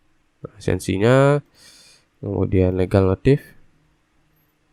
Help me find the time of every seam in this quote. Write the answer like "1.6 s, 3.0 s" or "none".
none